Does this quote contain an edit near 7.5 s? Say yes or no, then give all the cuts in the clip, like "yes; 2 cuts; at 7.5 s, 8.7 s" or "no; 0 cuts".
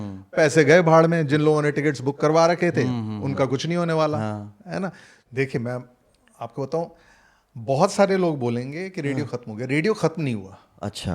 no; 1 cut; at 5.2 s